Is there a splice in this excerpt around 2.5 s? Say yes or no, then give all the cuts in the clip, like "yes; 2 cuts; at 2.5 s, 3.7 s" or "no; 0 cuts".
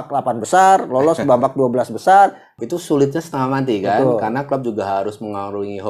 yes; 1 cut; at 2.5 s